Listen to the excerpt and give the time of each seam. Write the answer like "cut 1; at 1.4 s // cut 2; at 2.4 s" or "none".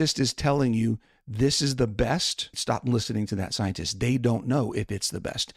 cut 1; at 2.5 s

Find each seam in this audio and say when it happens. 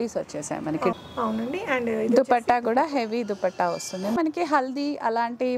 cut 1; at 0.9 s // cut 2; at 4.2 s

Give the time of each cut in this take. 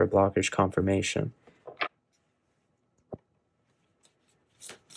none

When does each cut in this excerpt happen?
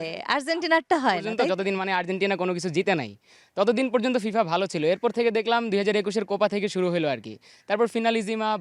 cut 1; at 1.4 s

